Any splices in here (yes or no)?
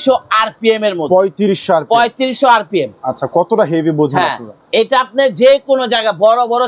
no